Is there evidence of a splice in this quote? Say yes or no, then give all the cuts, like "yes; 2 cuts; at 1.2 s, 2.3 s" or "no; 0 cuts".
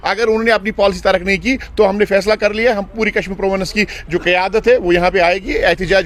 no; 0 cuts